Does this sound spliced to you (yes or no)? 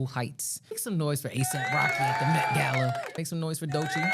yes